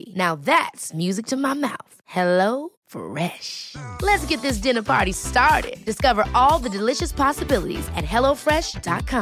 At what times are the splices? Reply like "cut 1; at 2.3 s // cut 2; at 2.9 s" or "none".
none